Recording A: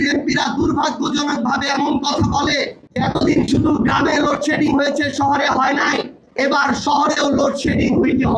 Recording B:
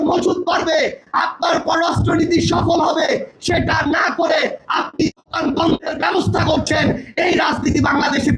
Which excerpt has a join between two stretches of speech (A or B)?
A